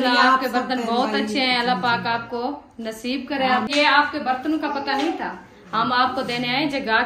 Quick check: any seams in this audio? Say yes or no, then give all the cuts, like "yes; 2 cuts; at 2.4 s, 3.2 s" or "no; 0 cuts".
yes; 1 cut; at 3.7 s